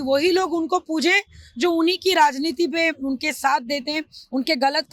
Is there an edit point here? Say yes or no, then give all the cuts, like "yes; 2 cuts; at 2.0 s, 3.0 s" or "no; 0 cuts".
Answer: no; 0 cuts